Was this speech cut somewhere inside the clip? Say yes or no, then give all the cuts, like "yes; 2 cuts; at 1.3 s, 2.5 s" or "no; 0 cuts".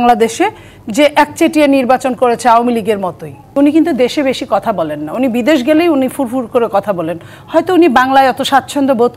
yes; 1 cut; at 3.5 s